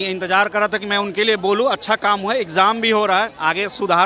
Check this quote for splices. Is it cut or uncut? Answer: uncut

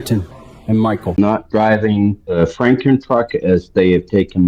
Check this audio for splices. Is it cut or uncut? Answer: cut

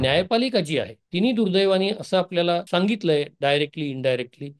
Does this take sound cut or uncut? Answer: cut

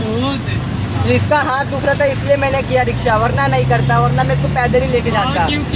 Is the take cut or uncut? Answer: uncut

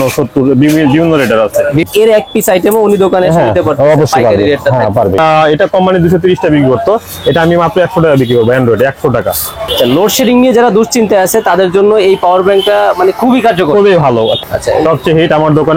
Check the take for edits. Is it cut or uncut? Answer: cut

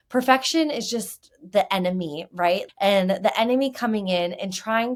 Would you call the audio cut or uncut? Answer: uncut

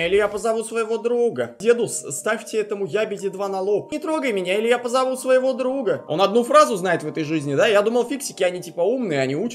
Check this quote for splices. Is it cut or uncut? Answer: cut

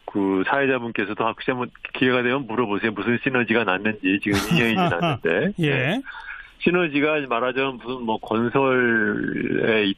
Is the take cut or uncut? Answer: uncut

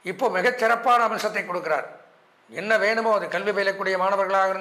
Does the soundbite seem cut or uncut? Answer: uncut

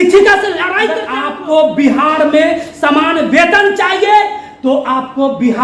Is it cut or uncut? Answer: cut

